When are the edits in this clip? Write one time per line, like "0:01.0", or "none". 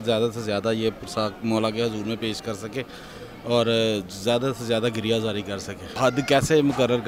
0:05.9